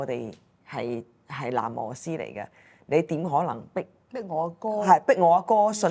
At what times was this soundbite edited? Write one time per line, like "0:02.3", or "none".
none